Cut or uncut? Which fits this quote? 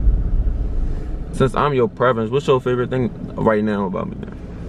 cut